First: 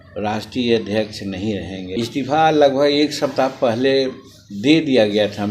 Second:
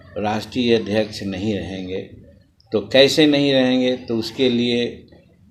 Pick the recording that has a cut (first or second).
first